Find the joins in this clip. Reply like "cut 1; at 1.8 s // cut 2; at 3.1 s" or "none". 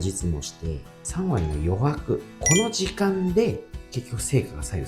none